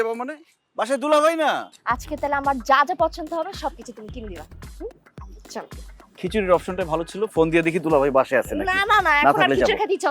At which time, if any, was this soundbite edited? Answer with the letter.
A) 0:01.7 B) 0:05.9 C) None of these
A